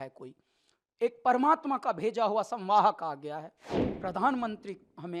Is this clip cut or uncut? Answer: cut